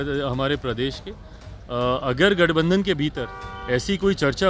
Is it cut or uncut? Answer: uncut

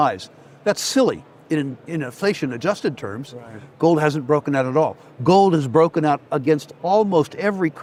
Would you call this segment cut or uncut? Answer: uncut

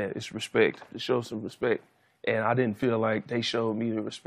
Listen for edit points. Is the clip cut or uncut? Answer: cut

